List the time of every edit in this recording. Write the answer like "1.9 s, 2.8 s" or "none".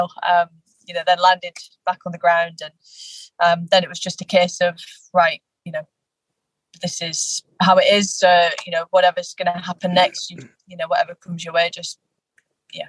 10.5 s